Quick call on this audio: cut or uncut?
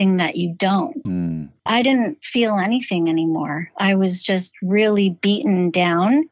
cut